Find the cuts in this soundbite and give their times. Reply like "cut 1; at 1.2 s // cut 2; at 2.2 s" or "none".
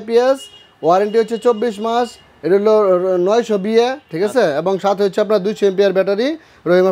none